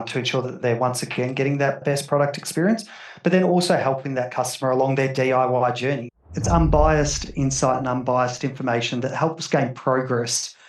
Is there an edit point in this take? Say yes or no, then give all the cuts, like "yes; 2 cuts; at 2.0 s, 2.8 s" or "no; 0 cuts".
yes; 2 cuts; at 1.8 s, 6.1 s